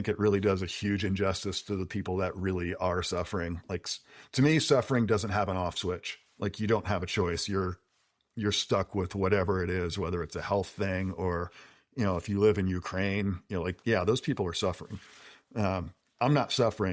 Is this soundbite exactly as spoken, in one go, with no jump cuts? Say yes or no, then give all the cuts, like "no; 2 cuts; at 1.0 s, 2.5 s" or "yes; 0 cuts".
yes; 0 cuts